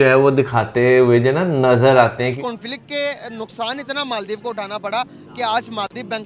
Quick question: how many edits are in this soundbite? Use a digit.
1